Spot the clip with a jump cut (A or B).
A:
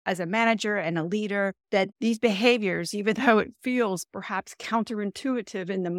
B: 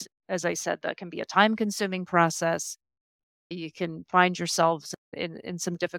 A